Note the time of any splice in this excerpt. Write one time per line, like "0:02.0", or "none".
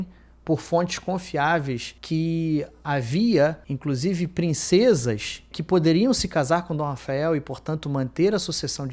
none